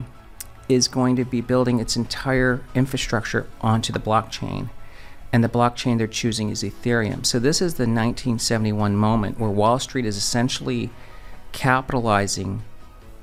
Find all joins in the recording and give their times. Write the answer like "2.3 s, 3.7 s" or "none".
none